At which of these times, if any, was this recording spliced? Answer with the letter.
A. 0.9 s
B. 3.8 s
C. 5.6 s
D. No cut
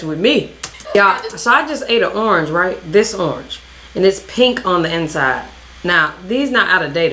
A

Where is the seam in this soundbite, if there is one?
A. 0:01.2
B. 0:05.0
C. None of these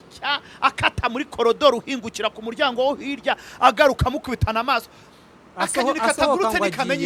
C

